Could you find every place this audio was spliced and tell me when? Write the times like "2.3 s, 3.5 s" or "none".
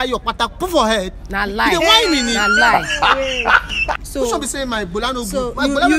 4.0 s